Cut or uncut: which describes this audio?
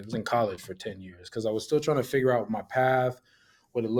uncut